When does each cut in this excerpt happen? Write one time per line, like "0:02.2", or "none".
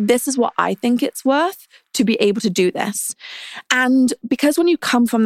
0:04.2